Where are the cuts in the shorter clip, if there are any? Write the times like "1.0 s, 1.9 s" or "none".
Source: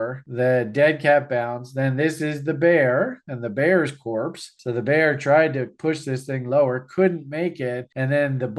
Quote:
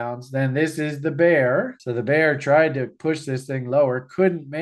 1.8 s